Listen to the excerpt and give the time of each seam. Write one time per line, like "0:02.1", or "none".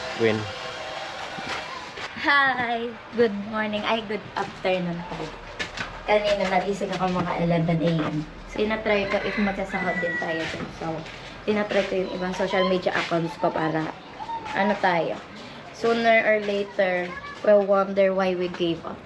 0:08.4